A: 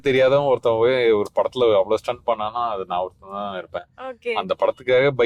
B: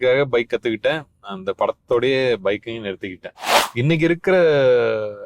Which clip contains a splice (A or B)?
B